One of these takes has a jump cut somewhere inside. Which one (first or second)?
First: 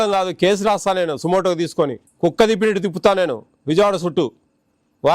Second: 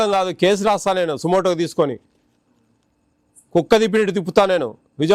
first